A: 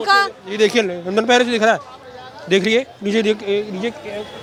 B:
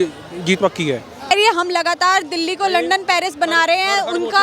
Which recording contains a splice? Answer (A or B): B